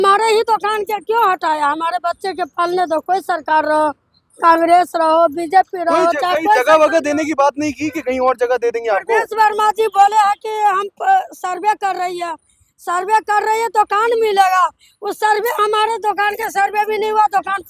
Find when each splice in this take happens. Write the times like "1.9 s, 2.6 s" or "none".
none